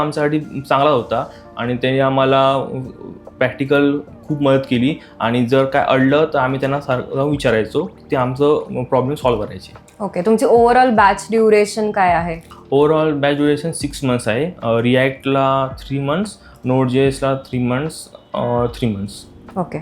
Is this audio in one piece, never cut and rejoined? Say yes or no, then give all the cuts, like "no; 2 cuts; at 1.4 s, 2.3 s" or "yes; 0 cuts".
yes; 0 cuts